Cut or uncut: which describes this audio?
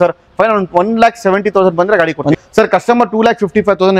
cut